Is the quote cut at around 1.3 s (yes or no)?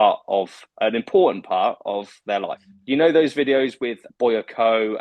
no